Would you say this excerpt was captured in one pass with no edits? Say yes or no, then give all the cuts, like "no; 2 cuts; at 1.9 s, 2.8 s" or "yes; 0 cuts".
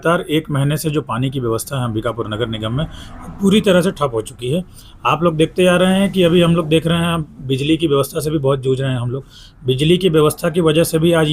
yes; 0 cuts